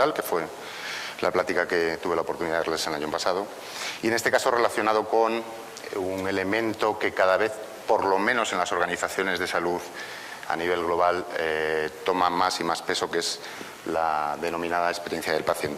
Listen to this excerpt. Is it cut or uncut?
cut